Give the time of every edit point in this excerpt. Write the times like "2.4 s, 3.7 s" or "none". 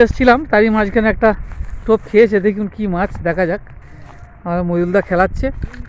none